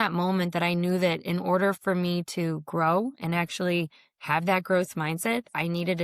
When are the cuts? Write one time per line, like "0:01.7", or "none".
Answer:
none